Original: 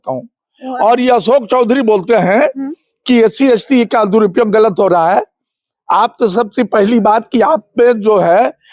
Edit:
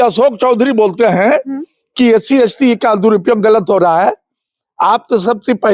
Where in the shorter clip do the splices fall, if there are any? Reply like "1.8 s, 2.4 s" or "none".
none